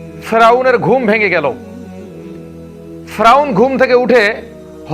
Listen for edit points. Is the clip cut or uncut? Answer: cut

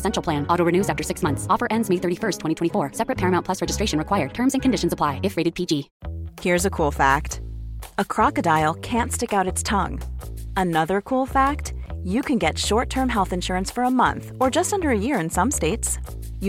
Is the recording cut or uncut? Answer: cut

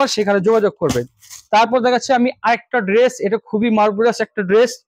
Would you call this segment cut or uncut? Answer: uncut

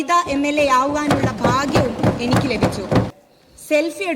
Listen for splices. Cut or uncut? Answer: cut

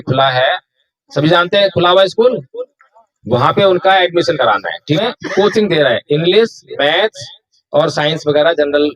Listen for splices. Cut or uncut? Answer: cut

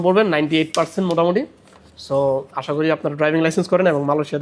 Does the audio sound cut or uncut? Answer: uncut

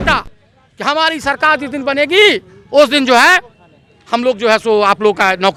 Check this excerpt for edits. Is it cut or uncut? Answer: uncut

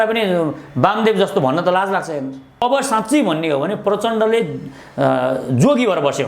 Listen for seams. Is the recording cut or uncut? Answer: cut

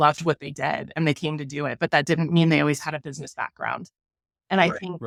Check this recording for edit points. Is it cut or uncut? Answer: uncut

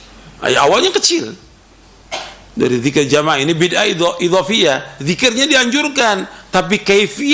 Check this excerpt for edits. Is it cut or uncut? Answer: uncut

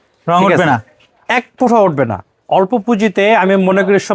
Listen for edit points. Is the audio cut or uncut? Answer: cut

